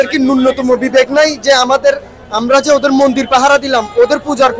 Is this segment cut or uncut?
uncut